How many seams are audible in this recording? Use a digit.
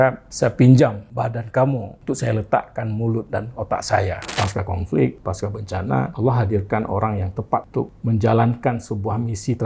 2